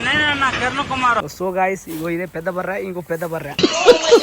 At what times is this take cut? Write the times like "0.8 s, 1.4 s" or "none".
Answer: 1.3 s

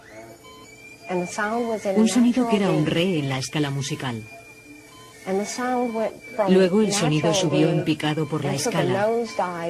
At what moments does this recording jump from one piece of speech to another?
4.9 s

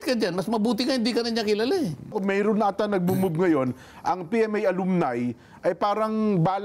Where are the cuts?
2.2 s

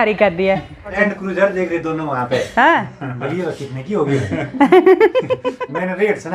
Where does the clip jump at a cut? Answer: 1.0 s

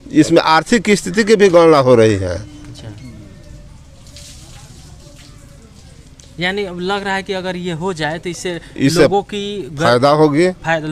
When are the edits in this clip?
none

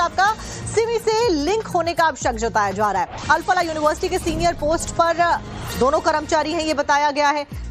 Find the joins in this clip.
4.9 s

